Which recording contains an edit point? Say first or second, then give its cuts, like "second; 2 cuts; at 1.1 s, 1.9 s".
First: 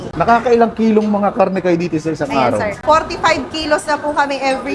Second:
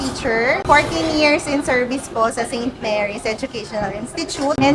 first; 1 cut; at 2.8 s